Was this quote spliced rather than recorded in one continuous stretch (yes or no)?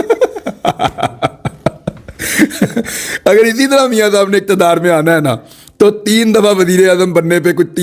no